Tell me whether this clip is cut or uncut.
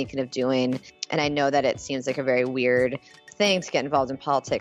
cut